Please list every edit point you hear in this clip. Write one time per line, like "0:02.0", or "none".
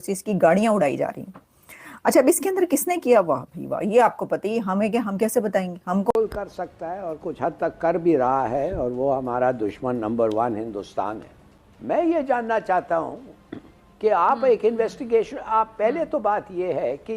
0:06.1